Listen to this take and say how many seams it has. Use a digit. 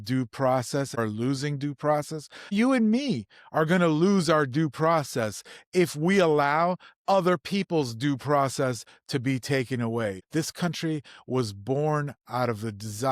3